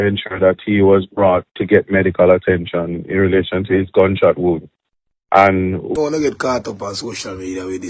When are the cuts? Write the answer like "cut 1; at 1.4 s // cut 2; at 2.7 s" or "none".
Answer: cut 1; at 5.9 s